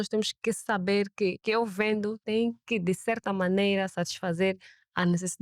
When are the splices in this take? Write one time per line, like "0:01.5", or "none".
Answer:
0:01.4
0:02.2